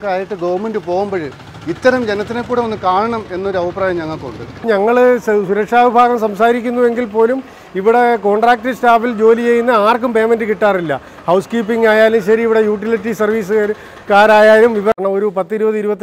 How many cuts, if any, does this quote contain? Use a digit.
2